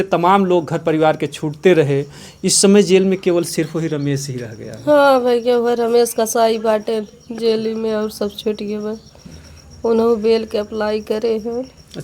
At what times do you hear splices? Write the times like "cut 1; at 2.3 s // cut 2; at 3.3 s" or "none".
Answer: none

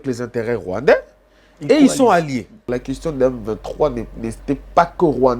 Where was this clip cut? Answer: cut 1; at 2.7 s

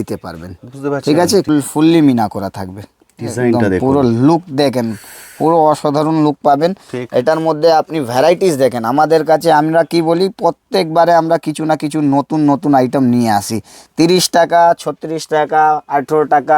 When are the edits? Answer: cut 1; at 1.5 s

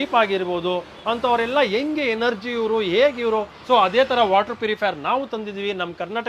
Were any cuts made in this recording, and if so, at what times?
cut 1; at 0.9 s // cut 2; at 3.5 s

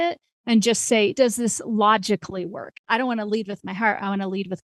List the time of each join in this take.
cut 1; at 1.1 s // cut 2; at 2.8 s

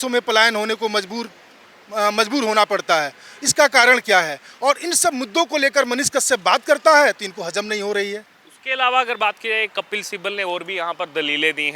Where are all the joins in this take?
none

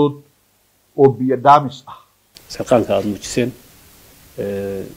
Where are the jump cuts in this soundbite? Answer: cut 1; at 2.3 s

